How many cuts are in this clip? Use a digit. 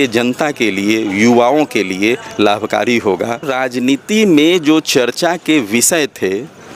1